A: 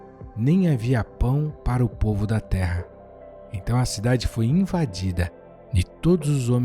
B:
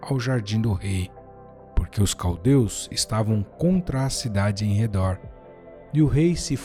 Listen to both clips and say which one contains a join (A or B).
A